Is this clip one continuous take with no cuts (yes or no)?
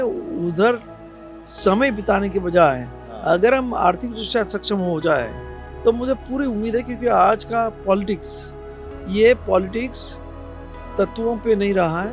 yes